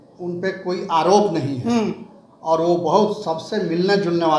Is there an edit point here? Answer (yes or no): no